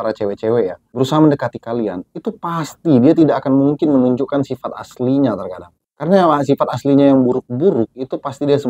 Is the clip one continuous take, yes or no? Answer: yes